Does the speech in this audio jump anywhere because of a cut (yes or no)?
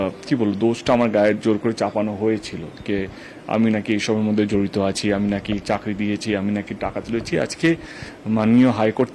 no